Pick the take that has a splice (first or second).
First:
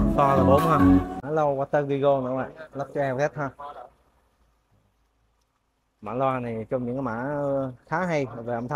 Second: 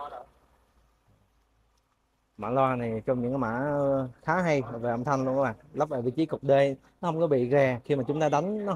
first